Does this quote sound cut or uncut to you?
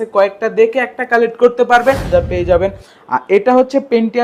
cut